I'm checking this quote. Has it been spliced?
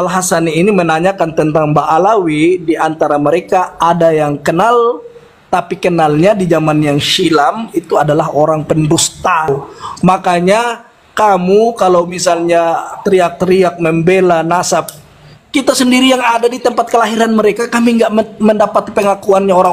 yes; 1 cut; at 9.5 s

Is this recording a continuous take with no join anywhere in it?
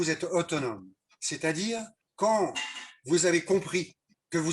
no; 1 cut; at 2.0 s

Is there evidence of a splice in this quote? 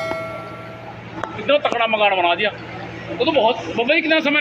no; 0 cuts

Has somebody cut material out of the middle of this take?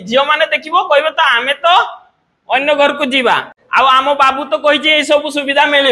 no; 0 cuts

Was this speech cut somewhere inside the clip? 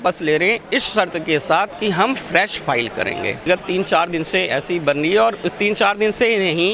yes; 1 cut; at 3.5 s

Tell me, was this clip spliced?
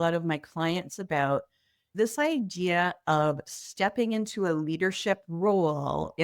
yes; 1 cut; at 1.9 s

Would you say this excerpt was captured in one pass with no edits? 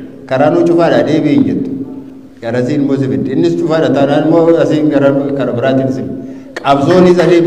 yes; 0 cuts

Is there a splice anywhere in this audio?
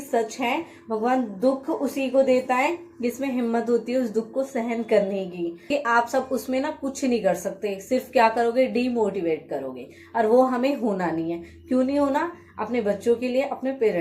yes; 1 cut; at 5.7 s

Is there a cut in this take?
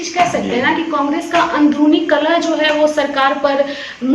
no; 0 cuts

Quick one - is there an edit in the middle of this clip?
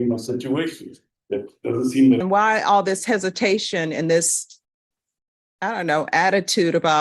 yes; 1 cut; at 2.2 s

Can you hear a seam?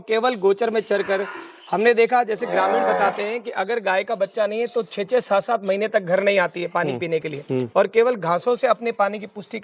no; 0 cuts

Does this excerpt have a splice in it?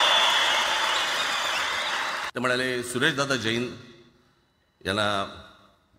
yes; 1 cut; at 2.3 s

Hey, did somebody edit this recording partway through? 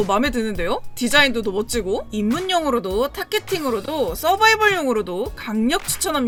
no; 0 cuts

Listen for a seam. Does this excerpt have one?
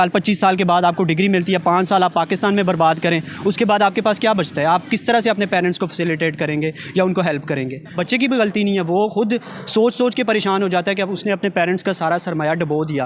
yes; 1 cut; at 8.0 s

